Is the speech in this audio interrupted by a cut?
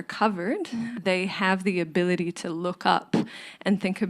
yes; 1 cut; at 0.9 s

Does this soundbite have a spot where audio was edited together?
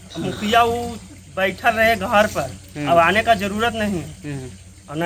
no; 0 cuts

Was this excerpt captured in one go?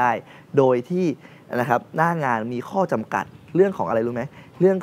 yes; 0 cuts

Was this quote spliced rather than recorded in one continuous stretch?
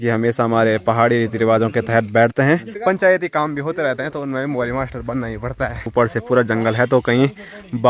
yes; 2 cuts; at 2.7 s, 5.9 s

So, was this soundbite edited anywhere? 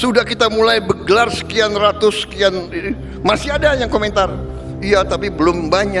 no; 0 cuts

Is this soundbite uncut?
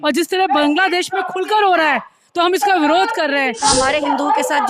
no; 1 cut; at 3.6 s

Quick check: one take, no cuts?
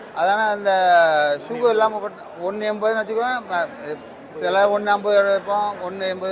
yes; 0 cuts

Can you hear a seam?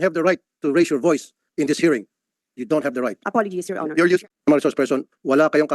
yes; 1 cut; at 4.2 s

